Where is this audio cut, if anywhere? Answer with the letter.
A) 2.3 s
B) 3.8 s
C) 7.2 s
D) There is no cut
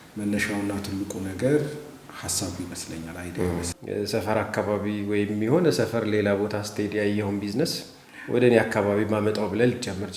B